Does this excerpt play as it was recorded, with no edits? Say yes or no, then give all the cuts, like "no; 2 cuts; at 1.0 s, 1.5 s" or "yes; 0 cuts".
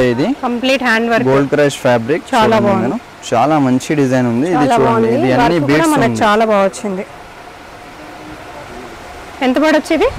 yes; 0 cuts